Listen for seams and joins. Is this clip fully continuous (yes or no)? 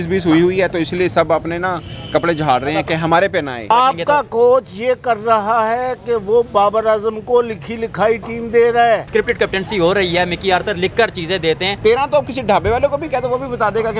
no